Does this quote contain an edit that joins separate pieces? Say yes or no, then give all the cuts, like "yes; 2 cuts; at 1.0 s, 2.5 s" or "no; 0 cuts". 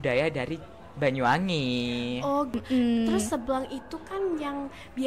yes; 1 cut; at 2.5 s